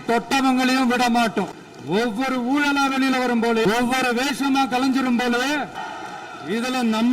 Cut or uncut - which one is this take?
cut